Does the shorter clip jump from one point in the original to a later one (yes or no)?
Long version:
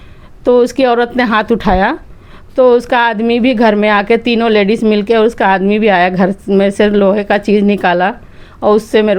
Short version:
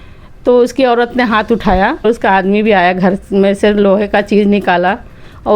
yes